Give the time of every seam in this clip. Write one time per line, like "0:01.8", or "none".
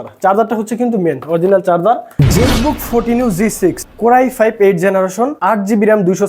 0:02.1
0:03.9
0:05.4